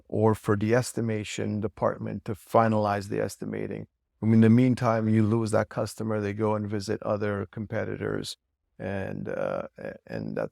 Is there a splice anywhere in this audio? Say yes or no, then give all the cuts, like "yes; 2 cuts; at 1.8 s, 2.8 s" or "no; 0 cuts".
no; 0 cuts